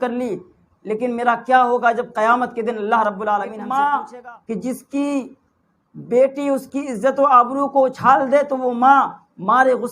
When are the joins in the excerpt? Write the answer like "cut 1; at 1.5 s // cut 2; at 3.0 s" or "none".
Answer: cut 1; at 3.6 s

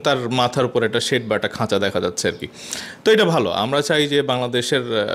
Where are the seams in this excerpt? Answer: none

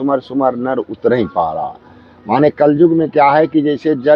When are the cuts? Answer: none

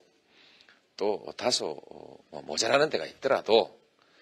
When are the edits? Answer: cut 1; at 3.1 s

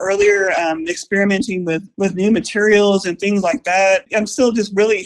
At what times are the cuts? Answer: cut 1; at 1.9 s // cut 2; at 4.1 s

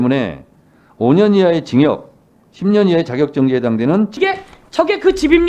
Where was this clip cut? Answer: cut 1; at 4.1 s

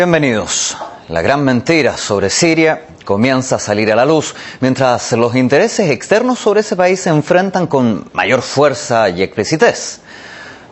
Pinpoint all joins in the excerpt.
none

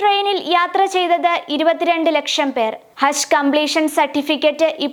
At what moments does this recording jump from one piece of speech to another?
none

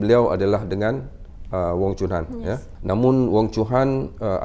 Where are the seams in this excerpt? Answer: cut 1; at 2.7 s

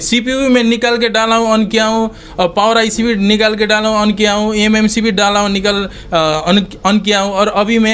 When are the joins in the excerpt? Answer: none

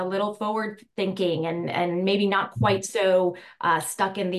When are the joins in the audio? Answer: none

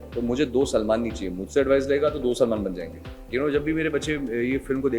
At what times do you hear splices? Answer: cut 1; at 3.3 s

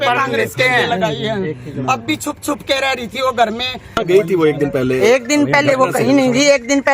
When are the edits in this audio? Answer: cut 1; at 4.0 s

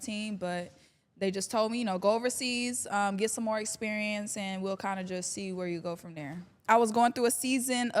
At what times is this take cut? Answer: cut 1; at 6.5 s

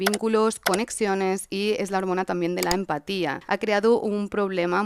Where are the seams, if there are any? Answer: cut 1; at 3.4 s

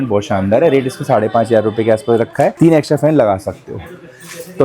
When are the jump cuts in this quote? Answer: none

